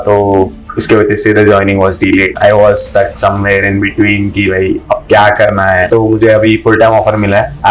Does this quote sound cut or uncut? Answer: cut